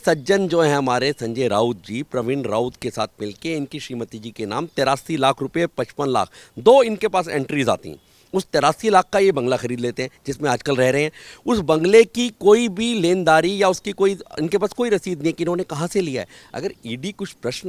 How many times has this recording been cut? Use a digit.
0